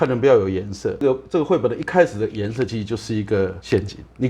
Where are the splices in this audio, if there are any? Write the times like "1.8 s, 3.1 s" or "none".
1.0 s

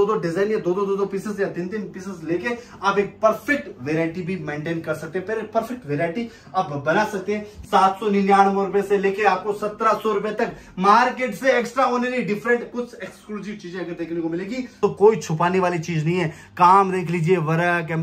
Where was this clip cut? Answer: 7.6 s, 14.7 s

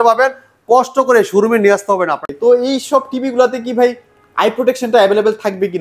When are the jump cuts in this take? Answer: 2.3 s

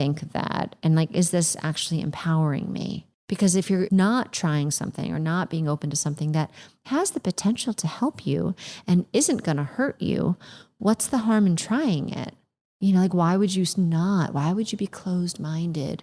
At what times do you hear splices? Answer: 3.7 s

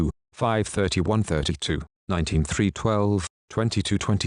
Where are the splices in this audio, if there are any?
0.9 s

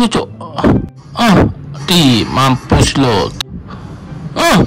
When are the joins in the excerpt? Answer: 1.0 s, 3.4 s

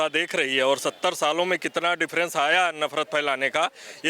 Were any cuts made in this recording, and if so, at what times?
none

